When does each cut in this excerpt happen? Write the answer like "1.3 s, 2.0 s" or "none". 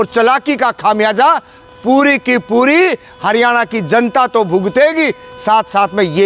none